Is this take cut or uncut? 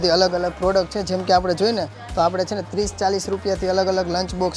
uncut